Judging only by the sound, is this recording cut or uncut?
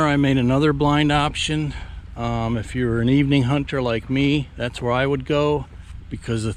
uncut